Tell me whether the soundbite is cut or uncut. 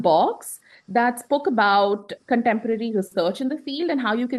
uncut